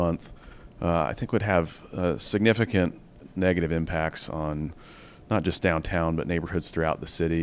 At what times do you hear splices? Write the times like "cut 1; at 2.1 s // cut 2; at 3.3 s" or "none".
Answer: none